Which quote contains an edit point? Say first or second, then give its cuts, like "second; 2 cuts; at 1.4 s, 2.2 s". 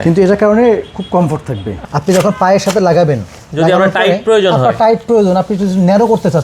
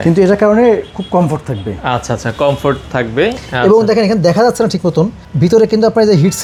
first; 1 cut; at 1.8 s